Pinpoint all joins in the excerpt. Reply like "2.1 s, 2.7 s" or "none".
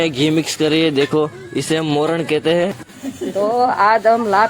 2.8 s